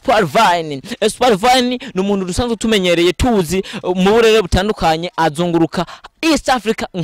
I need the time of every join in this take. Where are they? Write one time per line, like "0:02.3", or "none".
none